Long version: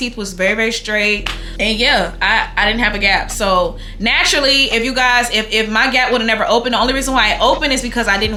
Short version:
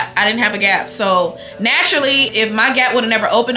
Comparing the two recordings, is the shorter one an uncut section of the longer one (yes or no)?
no